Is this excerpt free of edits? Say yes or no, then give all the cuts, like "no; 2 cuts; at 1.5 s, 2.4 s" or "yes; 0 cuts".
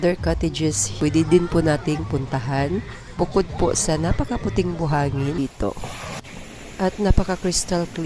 no; 2 cuts; at 0.9 s, 5.4 s